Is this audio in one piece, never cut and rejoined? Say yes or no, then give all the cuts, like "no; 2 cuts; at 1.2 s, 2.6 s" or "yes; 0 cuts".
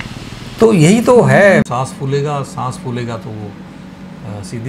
no; 1 cut; at 1.7 s